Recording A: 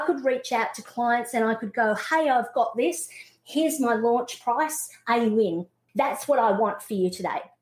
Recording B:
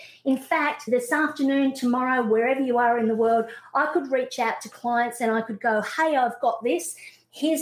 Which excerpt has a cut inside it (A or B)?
A